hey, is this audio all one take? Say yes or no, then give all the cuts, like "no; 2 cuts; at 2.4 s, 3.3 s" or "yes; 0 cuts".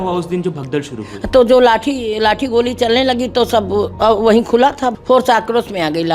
no; 1 cut; at 4.9 s